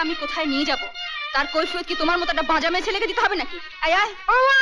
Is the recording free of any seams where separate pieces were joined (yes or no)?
yes